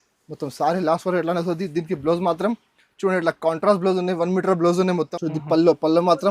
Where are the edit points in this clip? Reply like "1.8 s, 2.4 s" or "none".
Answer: 5.1 s